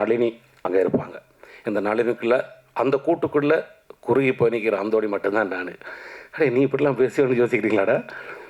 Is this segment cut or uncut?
uncut